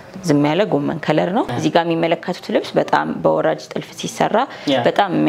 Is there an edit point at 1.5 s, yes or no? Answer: yes